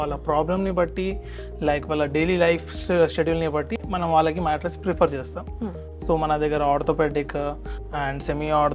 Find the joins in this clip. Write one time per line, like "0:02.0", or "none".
none